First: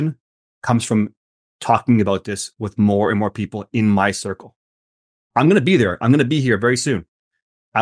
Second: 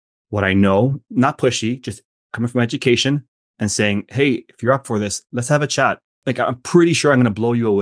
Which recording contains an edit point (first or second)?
second